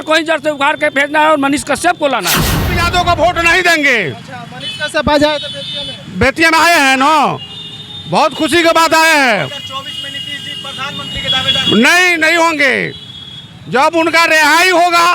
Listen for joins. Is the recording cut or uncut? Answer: cut